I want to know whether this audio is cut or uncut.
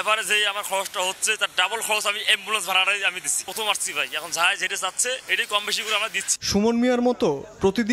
uncut